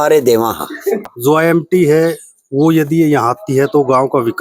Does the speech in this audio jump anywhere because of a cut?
yes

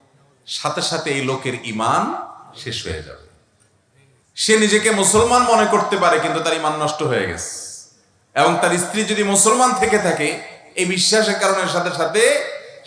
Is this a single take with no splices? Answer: yes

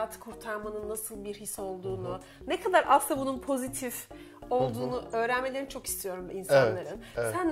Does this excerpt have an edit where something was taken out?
no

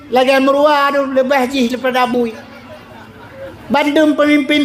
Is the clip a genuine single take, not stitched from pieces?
yes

